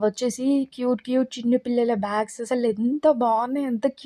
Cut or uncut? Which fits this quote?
uncut